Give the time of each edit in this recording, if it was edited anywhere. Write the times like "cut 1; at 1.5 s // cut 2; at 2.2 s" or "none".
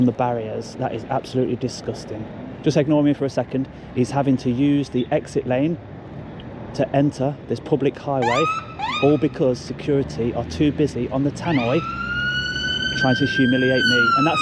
none

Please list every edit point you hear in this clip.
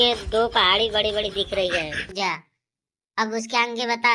cut 1; at 2.1 s

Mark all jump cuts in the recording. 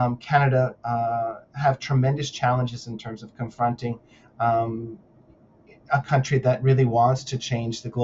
none

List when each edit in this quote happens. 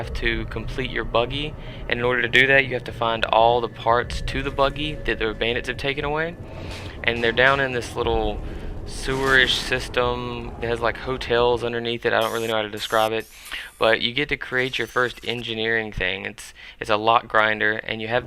cut 1; at 11.2 s

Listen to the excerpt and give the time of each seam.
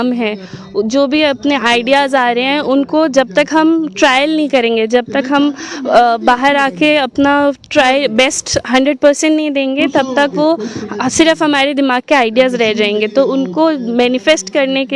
none

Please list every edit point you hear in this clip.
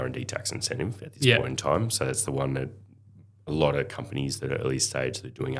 none

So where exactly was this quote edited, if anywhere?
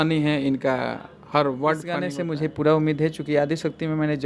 cut 1; at 2.1 s

